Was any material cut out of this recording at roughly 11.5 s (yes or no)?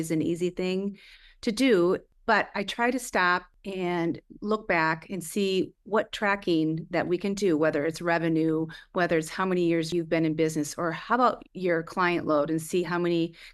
no